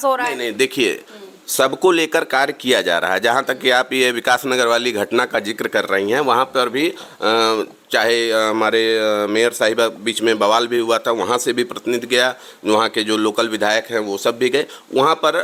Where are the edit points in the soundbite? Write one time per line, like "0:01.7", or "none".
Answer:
none